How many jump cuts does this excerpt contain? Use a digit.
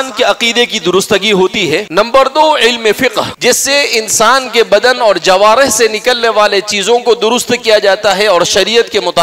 2